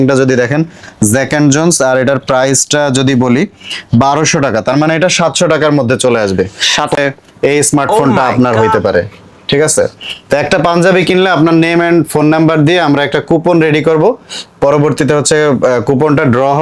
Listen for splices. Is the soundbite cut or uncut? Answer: cut